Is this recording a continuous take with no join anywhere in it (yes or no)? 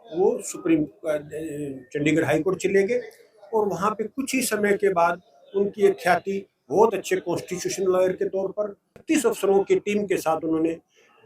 no